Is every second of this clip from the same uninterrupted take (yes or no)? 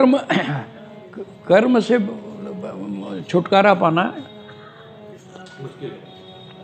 yes